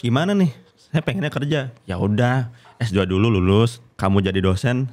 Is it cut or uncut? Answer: cut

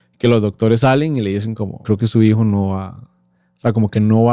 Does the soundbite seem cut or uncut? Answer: cut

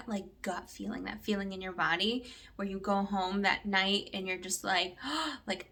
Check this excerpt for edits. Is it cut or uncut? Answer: uncut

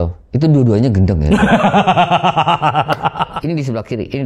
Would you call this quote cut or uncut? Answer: cut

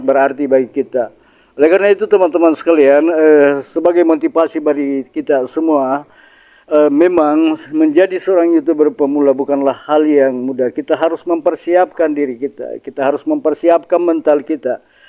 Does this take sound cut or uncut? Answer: uncut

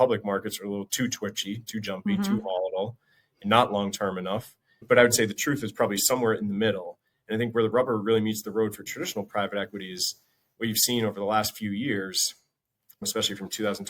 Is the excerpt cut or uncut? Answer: cut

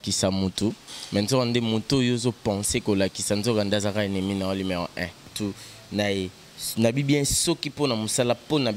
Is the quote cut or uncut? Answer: cut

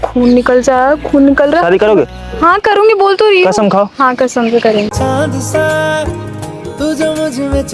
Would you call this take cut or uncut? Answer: uncut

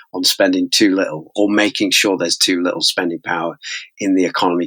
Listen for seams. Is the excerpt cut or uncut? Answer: uncut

